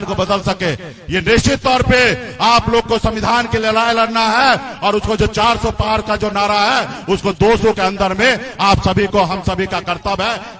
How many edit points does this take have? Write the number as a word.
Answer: zero